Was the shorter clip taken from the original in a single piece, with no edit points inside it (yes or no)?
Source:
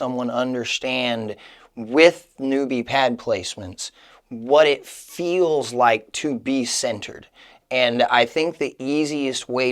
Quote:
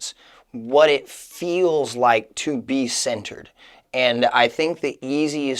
yes